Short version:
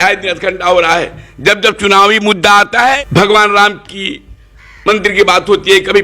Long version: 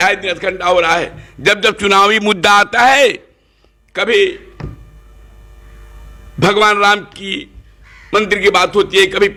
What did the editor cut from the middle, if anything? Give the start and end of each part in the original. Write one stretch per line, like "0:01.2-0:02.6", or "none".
0:03.0-0:06.2